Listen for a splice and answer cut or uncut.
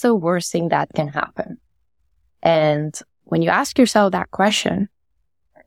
uncut